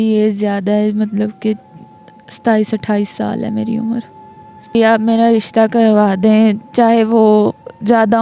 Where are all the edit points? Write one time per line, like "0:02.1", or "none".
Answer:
0:04.8